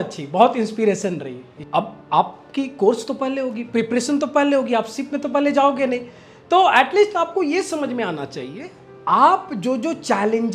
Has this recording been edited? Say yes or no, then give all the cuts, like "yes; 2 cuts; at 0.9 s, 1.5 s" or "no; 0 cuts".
yes; 1 cut; at 1.5 s